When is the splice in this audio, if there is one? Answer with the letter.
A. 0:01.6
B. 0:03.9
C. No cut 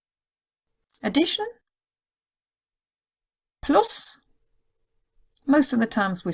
B